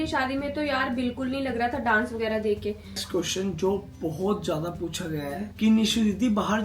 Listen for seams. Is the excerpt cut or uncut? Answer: cut